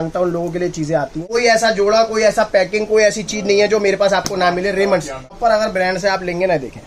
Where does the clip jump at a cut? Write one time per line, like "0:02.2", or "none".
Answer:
0:01.2
0:05.4